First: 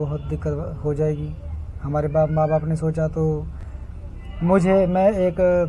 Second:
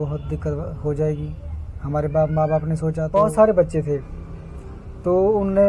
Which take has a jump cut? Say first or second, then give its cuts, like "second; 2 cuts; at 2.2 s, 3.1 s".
second; 1 cut; at 3.0 s